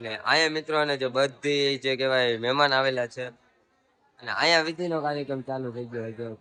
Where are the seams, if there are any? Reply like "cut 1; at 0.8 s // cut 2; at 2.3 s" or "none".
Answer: none